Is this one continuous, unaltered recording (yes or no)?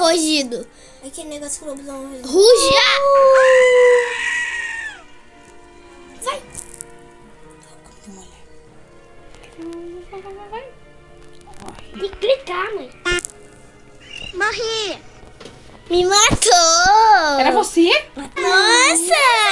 no